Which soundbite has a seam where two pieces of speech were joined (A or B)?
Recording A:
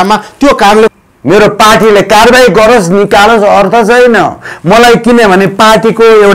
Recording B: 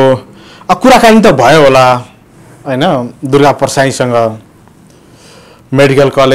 A